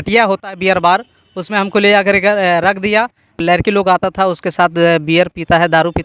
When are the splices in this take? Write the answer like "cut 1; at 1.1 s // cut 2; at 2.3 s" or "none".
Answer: cut 1; at 3.4 s